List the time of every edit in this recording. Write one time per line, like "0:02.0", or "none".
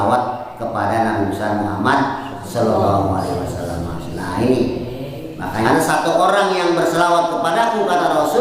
0:05.6